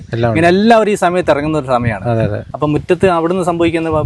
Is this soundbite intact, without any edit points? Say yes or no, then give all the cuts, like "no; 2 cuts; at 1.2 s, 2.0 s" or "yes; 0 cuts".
no; 1 cut; at 2.4 s